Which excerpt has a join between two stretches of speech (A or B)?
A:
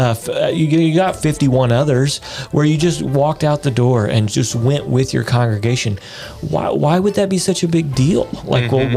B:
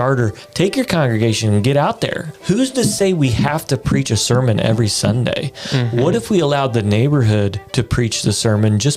B